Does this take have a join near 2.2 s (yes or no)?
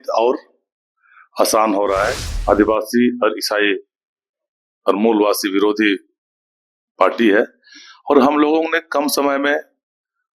yes